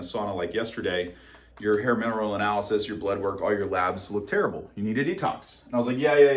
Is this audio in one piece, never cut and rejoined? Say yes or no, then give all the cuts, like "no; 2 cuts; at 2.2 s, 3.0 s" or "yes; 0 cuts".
yes; 0 cuts